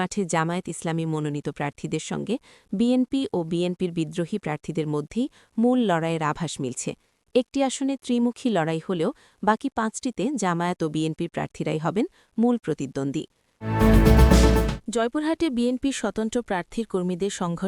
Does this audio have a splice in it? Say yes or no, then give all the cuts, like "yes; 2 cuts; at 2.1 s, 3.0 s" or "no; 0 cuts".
yes; 2 cuts; at 13.5 s, 14.7 s